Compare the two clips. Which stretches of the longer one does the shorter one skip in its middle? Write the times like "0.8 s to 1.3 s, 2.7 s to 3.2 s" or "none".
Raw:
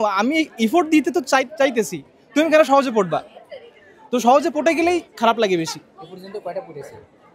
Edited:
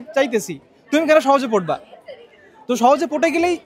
none